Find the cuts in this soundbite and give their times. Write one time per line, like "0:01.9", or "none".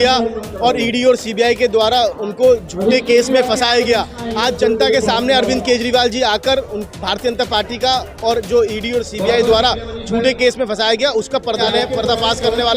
0:11.6